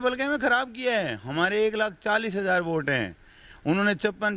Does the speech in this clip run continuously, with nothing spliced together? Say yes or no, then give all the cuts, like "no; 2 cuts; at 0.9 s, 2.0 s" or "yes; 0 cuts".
yes; 0 cuts